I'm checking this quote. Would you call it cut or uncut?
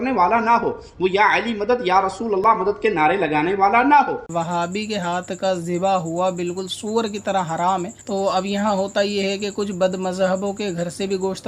cut